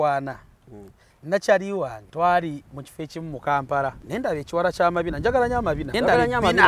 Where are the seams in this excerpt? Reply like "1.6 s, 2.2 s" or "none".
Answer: 2.0 s, 4.0 s, 5.9 s